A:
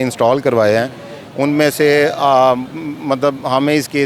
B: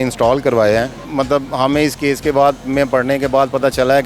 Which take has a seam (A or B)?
B